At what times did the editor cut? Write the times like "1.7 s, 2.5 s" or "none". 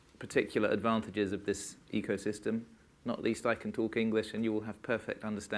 2.9 s